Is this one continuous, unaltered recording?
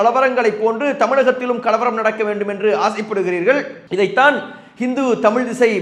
yes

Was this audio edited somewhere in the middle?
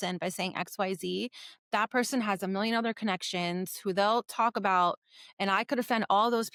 no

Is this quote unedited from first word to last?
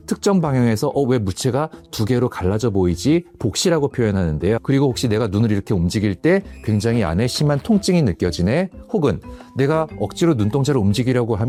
yes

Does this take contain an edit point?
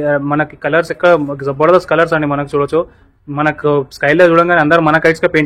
no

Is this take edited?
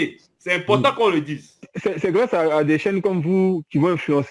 yes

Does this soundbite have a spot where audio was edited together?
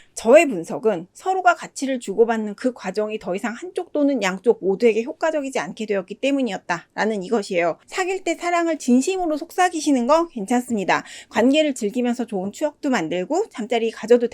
yes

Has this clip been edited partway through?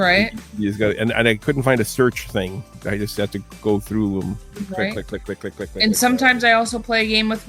no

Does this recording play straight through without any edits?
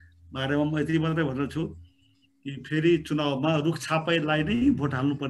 yes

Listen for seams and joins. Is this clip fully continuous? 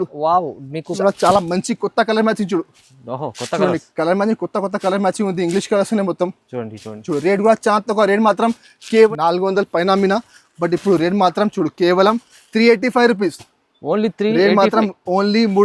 no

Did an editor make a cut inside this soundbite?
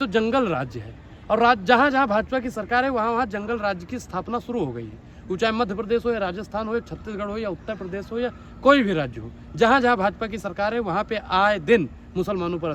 no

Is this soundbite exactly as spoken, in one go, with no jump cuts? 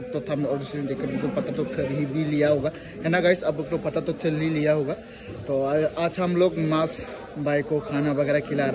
yes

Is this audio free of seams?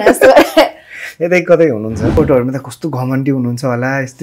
no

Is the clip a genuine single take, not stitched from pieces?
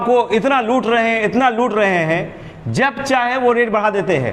yes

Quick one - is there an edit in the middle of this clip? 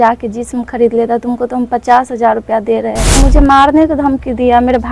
yes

